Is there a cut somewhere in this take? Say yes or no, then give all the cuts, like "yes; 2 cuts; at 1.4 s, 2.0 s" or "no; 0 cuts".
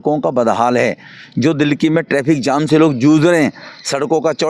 no; 0 cuts